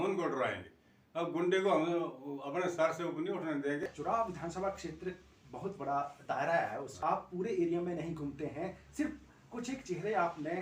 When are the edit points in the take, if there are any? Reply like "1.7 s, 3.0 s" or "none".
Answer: 3.8 s, 6.9 s